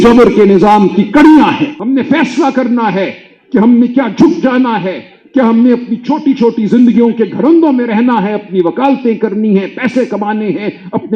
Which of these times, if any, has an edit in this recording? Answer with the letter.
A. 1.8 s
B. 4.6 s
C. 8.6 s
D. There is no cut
A